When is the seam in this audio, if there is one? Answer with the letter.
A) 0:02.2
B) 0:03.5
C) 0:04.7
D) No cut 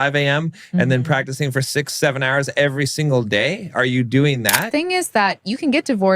C